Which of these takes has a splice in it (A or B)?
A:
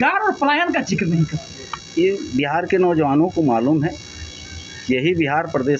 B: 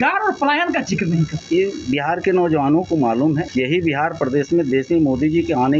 B